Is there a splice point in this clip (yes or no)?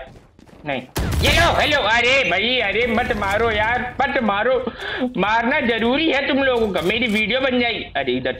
no